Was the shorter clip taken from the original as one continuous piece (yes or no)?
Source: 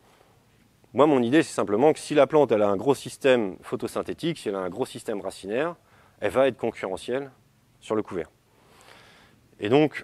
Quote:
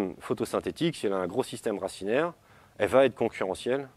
yes